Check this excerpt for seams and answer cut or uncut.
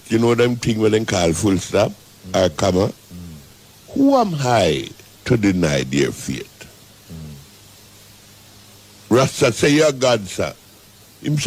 uncut